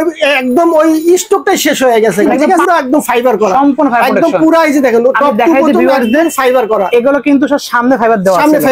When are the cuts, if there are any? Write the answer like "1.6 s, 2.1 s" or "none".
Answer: 2.6 s